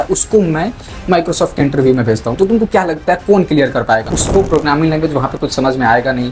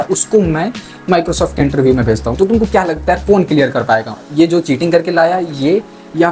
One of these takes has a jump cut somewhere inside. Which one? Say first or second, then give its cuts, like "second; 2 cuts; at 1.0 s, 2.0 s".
first; 1 cut; at 4.2 s